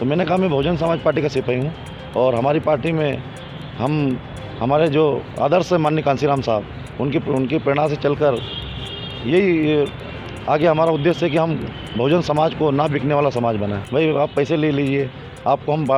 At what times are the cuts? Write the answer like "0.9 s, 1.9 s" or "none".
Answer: 13.8 s

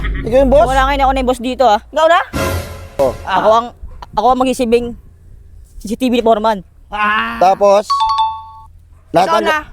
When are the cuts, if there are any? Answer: 3.0 s

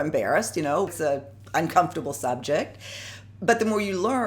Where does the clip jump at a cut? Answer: 0.9 s

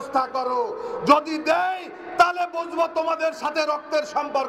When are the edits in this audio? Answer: none

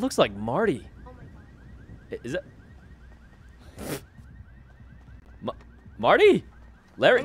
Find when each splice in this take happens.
none

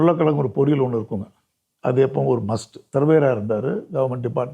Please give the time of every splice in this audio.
2.8 s

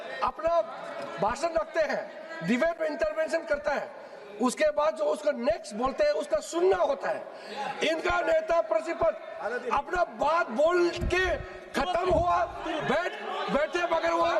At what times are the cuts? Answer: none

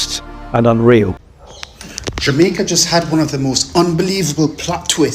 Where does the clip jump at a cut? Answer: 1.1 s

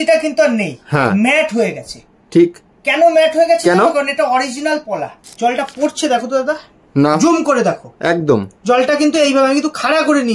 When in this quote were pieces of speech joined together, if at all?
5.3 s

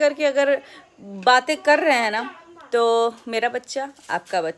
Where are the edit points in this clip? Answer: none

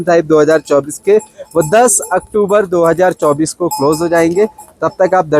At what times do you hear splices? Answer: none

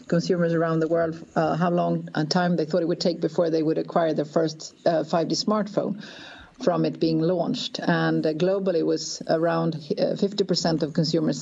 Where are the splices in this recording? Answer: none

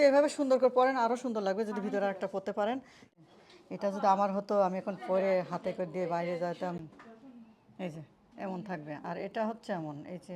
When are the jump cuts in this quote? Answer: 3.1 s, 6.8 s

